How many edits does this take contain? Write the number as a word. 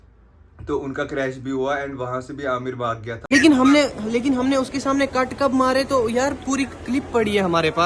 one